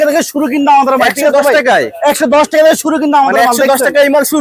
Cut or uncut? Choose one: uncut